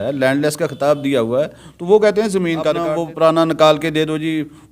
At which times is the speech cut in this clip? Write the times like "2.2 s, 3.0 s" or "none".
2.9 s